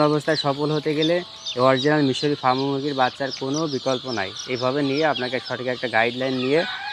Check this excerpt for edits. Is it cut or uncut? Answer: uncut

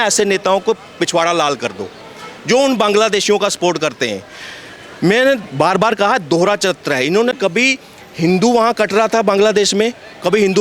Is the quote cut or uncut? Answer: uncut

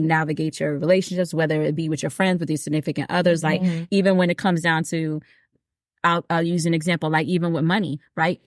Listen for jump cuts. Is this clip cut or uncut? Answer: uncut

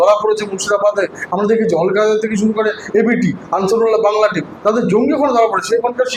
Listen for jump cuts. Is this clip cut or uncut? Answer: uncut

